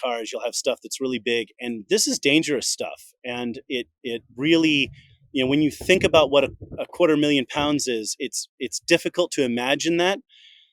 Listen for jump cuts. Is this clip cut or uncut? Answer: cut